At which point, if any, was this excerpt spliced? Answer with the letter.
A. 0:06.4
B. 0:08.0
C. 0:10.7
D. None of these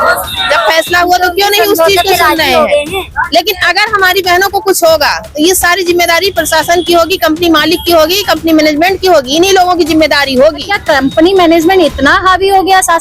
C